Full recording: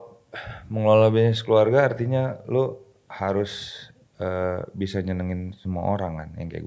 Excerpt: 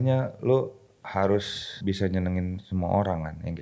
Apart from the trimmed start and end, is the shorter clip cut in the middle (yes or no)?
yes